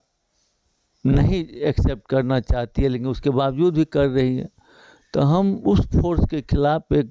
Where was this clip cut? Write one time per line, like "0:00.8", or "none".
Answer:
none